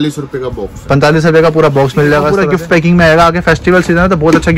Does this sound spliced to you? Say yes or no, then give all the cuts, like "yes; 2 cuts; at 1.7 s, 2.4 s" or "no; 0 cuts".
yes; 1 cut; at 2.3 s